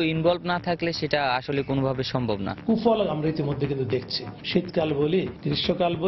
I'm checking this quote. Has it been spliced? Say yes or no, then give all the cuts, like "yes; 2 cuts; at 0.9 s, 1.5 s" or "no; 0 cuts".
yes; 1 cut; at 2.5 s